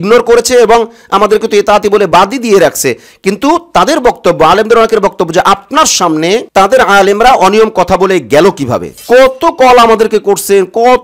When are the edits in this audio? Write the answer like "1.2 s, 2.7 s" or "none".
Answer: 9.0 s